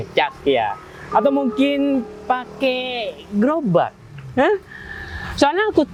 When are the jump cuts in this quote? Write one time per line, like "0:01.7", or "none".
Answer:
none